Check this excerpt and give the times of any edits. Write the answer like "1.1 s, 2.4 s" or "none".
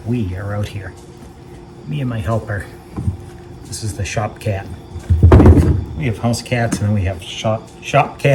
none